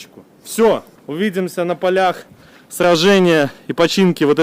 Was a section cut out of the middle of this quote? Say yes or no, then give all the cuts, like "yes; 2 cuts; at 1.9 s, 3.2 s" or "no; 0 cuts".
yes; 1 cut; at 1.0 s